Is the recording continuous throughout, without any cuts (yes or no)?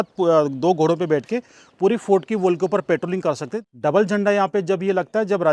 no